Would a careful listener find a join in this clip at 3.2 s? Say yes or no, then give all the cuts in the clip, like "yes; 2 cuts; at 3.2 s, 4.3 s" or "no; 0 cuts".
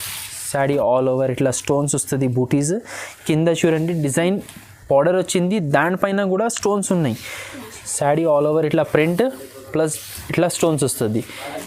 no; 0 cuts